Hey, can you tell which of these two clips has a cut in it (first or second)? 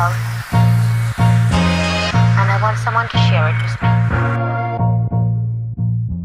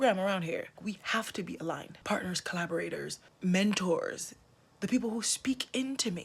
second